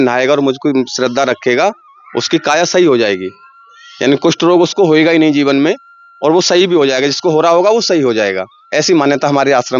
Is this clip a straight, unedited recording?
yes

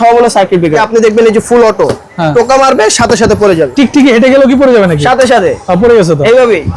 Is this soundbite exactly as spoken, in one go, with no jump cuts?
no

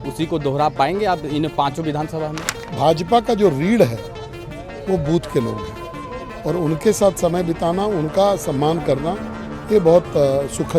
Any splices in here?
yes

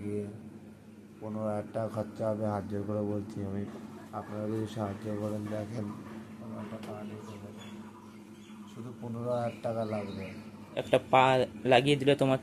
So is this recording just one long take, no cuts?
no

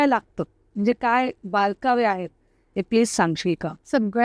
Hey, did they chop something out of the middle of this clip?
no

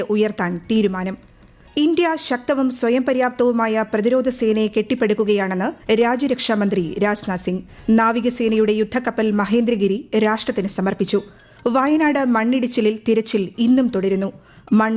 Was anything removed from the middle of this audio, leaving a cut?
yes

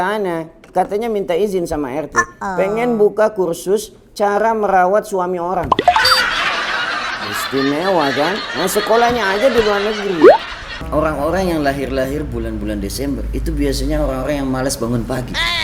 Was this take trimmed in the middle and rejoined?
yes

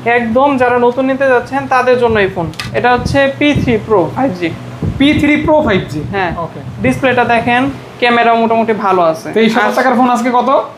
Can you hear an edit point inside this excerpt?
yes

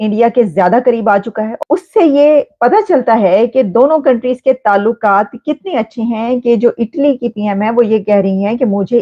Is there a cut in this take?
yes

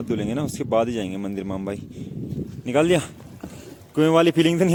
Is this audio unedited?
yes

